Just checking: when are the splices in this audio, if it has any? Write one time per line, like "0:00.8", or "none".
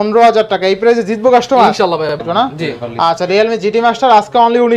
0:02.1